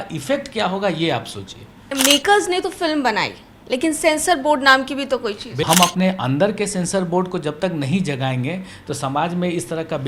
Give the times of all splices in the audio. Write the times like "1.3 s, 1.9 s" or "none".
1.9 s, 5.6 s